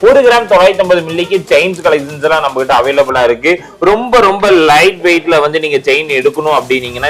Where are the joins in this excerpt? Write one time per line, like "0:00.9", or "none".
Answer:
none

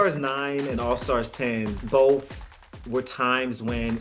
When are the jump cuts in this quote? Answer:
0:01.8

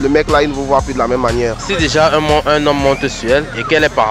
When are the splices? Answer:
0:01.6

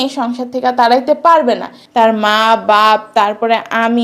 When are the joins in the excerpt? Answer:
0:01.7

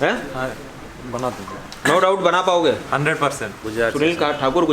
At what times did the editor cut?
none

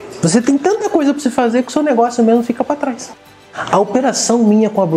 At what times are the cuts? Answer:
0:03.1

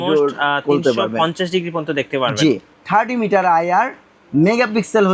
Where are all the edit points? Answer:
0:02.8

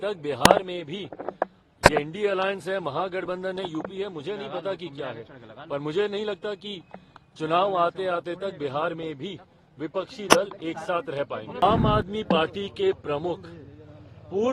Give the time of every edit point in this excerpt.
0:11.6

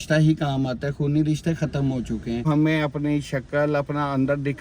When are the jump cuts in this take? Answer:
0:02.5

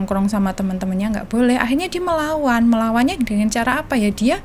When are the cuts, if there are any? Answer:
none

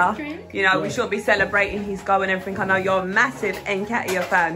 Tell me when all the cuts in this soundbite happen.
none

